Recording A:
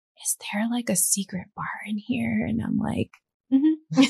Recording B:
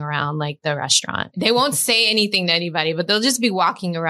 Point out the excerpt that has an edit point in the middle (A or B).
B